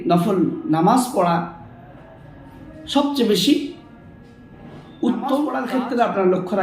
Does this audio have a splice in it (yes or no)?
yes